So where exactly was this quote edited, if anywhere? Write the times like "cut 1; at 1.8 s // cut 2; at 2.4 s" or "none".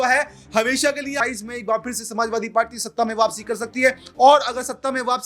cut 1; at 1.2 s